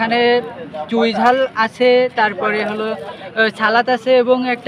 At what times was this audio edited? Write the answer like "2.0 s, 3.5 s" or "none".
none